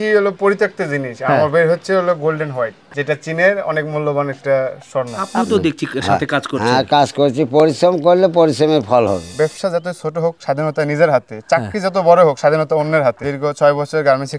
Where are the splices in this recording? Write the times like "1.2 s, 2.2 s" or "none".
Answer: 2.9 s, 5.2 s, 9.2 s, 13.3 s